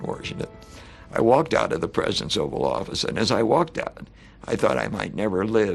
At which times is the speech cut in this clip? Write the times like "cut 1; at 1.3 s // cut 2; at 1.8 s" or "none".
none

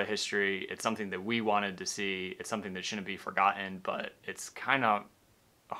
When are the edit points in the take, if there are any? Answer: none

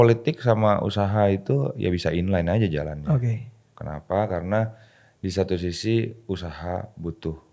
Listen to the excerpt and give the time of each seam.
none

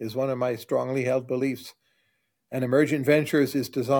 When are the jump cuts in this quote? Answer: none

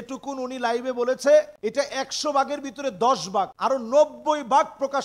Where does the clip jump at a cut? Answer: cut 1; at 1.5 s // cut 2; at 3.5 s

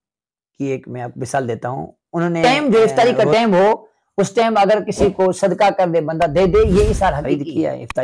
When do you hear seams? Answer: cut 1; at 2.4 s // cut 2; at 7.2 s

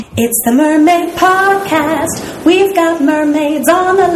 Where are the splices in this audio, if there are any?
none

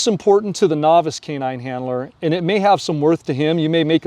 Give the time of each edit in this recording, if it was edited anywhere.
cut 1; at 2.1 s

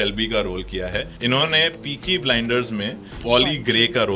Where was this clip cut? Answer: cut 1; at 1.1 s // cut 2; at 3.2 s

